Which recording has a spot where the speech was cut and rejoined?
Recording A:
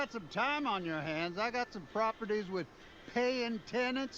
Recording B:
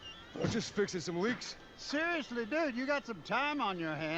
A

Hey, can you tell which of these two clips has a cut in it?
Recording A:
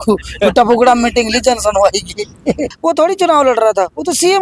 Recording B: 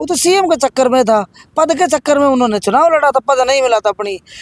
A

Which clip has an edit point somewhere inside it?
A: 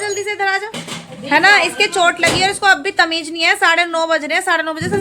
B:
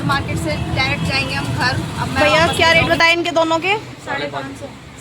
B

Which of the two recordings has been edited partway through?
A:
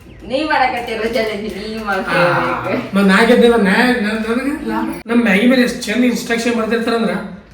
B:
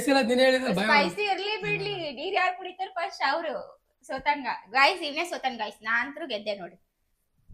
A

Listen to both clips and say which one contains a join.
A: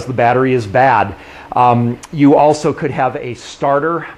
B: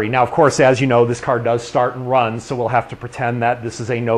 B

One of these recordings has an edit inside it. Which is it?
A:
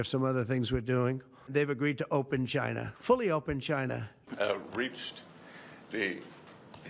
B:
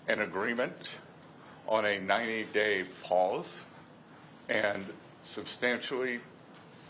A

